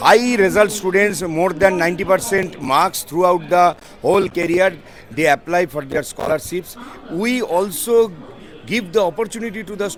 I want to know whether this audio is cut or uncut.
uncut